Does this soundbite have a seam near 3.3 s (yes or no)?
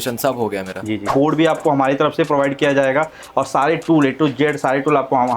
no